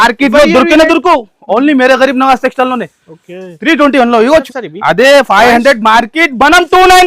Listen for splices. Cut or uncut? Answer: cut